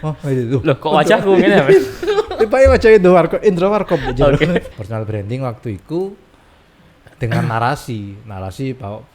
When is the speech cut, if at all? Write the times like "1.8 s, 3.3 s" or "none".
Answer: 4.8 s